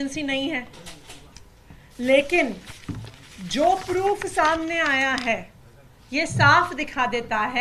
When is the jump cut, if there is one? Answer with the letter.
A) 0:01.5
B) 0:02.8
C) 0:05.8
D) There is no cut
D